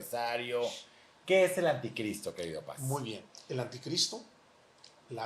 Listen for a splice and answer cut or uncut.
cut